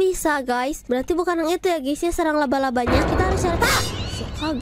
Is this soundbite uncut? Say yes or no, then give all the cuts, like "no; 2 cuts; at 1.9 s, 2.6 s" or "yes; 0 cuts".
yes; 0 cuts